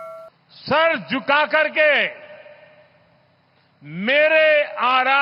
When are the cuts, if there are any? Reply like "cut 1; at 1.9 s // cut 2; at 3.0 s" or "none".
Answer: none